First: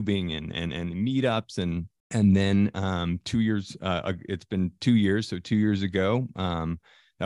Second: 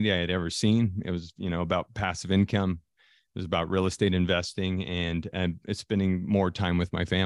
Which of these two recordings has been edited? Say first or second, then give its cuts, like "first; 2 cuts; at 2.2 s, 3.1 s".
first; 1 cut; at 1.9 s